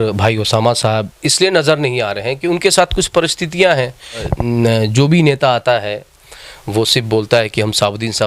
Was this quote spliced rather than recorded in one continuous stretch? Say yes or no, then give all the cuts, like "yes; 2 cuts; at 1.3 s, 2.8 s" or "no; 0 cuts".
yes; 1 cut; at 4.3 s